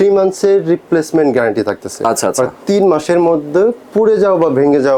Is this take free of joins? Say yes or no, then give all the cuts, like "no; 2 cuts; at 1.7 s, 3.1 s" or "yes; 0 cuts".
yes; 0 cuts